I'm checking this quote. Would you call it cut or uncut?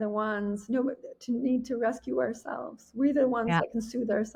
uncut